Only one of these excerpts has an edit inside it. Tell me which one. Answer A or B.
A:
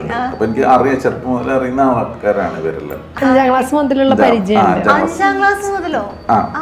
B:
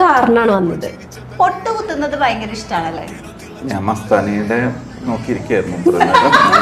A